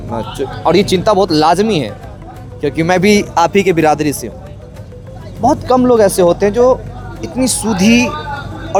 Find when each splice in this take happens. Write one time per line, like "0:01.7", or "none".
none